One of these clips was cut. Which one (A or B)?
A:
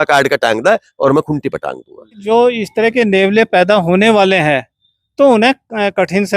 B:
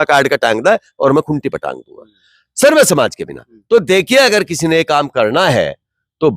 A